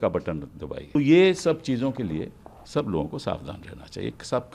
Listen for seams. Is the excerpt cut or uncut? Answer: cut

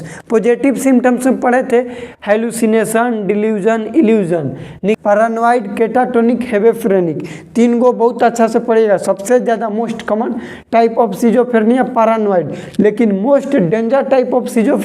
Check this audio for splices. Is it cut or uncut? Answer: cut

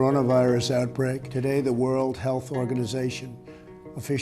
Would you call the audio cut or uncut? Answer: cut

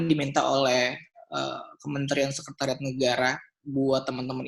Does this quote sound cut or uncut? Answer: uncut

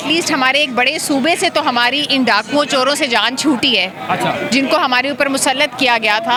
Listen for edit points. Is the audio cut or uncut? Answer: uncut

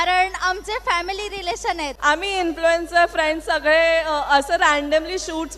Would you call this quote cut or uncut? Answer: cut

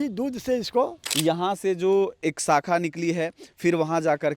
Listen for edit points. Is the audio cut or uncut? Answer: cut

